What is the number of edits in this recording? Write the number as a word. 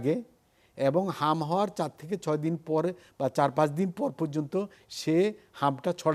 zero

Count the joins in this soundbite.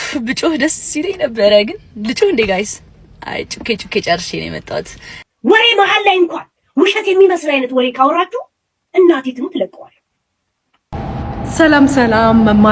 two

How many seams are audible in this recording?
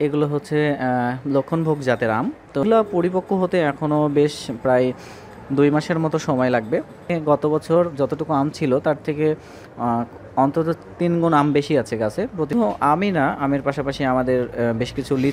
three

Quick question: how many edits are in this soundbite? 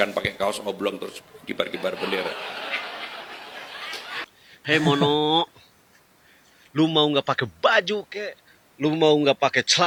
zero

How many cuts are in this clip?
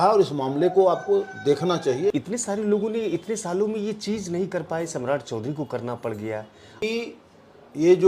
two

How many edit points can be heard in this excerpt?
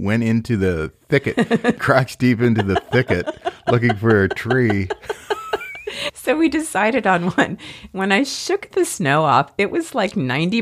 one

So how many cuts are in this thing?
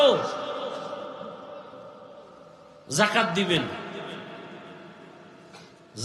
one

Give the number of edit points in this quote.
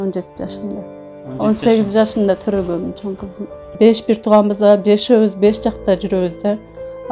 one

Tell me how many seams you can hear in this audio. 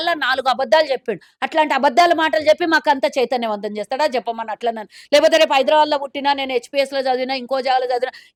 zero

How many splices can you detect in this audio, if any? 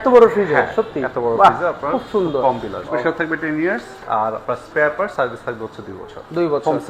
one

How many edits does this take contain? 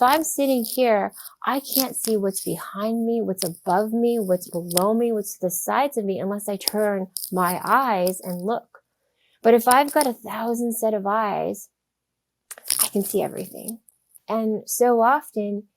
one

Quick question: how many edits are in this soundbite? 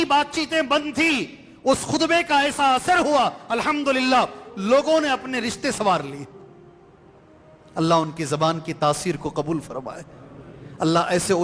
two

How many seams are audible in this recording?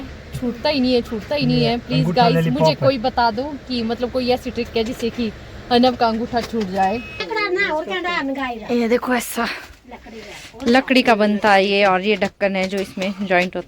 one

